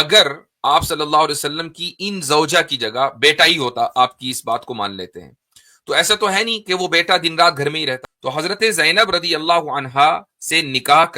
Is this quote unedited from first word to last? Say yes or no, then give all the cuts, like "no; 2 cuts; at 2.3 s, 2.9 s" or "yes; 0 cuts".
no; 1 cut; at 8.0 s